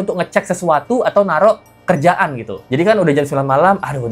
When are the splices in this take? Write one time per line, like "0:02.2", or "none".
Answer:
none

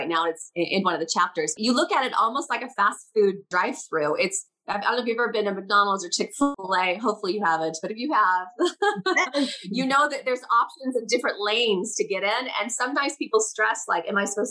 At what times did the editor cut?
0:01.5
0:03.5
0:06.5

